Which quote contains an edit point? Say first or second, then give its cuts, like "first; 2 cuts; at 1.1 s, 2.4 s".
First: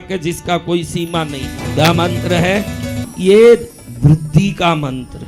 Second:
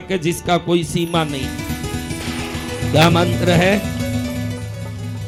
first; 2 cuts; at 1.6 s, 3.0 s